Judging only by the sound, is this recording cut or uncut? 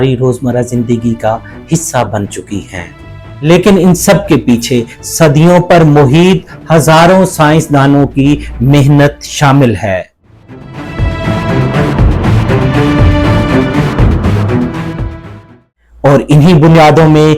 uncut